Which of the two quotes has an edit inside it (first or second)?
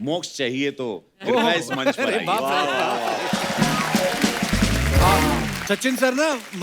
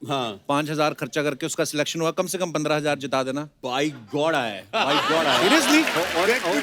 first